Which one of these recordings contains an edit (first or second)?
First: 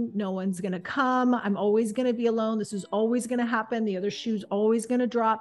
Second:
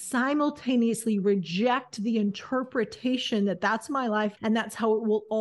second